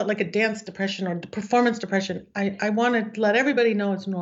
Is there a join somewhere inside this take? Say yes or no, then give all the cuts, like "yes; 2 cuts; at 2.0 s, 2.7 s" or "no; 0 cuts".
no; 0 cuts